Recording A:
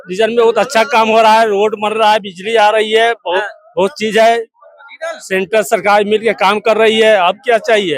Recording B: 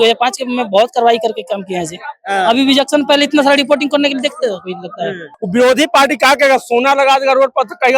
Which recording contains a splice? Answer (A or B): B